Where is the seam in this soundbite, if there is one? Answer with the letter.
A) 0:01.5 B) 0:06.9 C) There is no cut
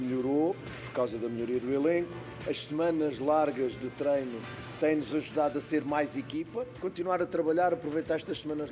B